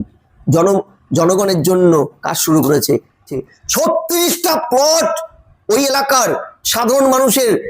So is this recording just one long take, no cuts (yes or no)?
no